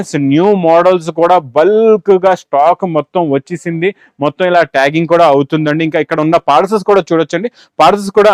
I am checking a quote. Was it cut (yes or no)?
no